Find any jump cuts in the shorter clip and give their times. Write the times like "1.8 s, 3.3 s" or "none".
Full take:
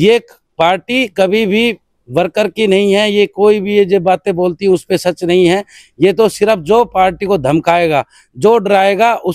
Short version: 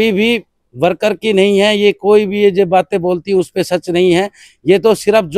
none